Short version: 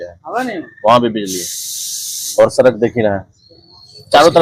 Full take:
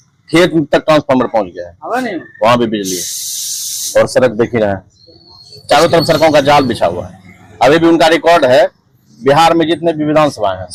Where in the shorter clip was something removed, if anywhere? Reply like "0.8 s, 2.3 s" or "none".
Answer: none